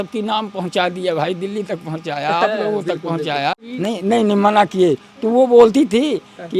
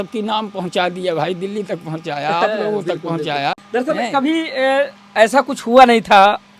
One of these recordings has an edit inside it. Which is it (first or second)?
first